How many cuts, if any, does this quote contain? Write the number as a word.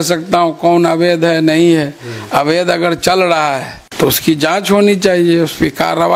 one